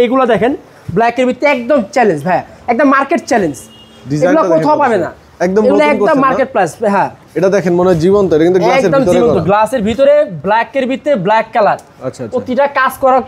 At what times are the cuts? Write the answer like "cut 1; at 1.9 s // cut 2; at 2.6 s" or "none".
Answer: none